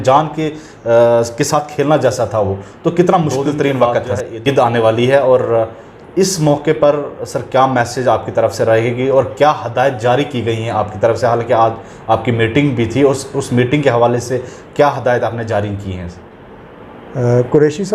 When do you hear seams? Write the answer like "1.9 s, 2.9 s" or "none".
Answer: 4.4 s